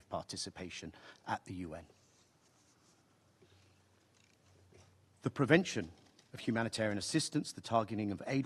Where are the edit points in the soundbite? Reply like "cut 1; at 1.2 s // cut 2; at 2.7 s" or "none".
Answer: none